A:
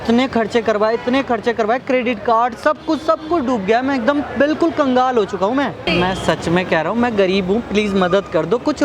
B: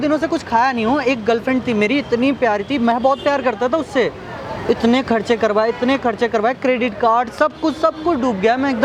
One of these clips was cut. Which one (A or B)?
A